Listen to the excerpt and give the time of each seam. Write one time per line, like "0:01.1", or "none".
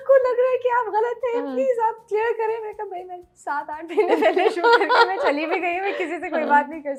none

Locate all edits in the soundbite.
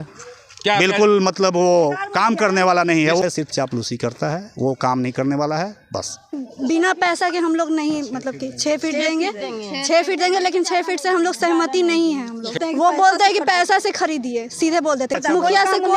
0:03.2
0:06.4
0:12.6
0:15.2

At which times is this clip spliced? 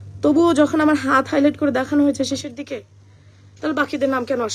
none

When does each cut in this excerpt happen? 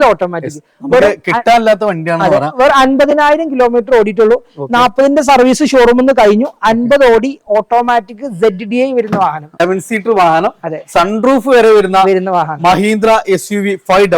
0:09.6

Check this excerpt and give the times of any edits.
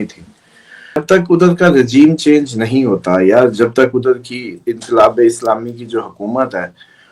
0:01.0

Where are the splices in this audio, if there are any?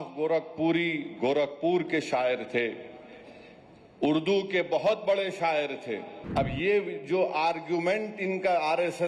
0:06.2

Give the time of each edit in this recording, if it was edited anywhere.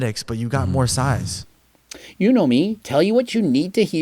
0:01.3

